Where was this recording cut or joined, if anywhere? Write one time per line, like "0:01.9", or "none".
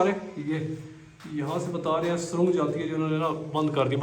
none